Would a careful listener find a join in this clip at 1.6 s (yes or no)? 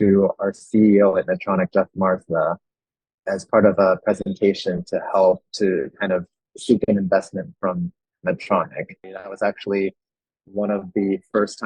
no